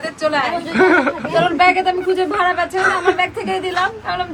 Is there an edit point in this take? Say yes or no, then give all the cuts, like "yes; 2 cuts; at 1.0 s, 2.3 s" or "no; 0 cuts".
no; 0 cuts